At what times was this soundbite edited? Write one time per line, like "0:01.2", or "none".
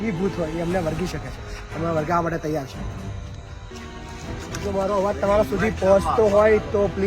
0:03.7